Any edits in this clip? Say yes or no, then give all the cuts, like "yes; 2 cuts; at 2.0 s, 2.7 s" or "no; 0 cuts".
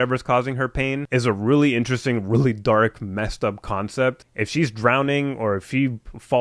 yes; 1 cut; at 4.3 s